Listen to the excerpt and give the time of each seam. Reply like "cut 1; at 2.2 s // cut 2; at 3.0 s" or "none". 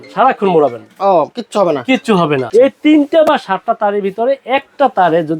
cut 1; at 2.4 s